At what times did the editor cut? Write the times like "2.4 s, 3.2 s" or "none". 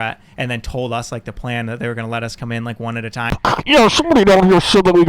3.3 s